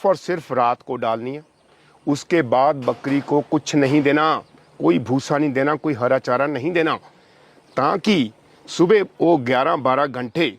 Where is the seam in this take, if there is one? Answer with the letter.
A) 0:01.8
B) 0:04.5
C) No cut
C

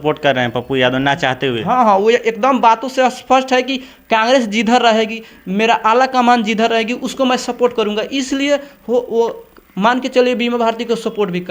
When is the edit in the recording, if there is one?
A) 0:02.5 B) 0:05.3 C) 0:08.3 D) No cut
D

